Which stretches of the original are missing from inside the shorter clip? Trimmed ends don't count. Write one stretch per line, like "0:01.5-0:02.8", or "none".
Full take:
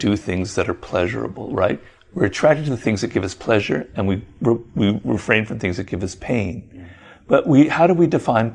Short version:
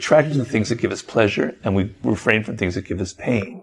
0:04.3-0:05.0